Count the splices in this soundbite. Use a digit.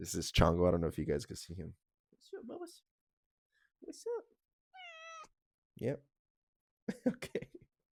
0